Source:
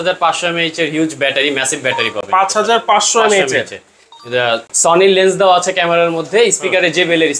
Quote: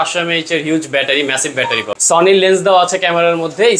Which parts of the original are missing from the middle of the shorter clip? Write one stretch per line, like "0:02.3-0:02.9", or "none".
0:02.2-0:04.7